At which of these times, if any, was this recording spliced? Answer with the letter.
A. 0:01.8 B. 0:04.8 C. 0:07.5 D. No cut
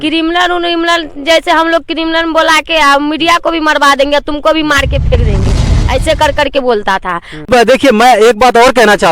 C